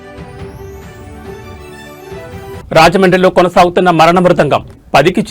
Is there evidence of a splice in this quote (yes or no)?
yes